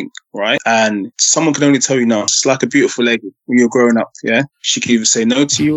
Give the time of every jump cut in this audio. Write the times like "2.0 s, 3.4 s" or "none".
2.3 s